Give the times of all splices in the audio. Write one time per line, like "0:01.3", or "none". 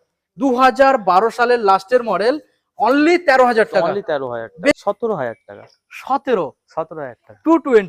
0:04.7